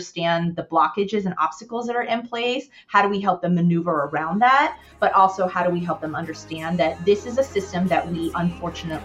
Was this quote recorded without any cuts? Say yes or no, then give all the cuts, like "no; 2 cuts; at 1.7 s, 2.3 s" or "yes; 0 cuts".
yes; 0 cuts